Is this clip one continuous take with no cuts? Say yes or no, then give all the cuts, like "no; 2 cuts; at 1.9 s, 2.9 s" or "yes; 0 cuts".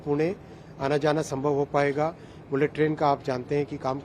yes; 0 cuts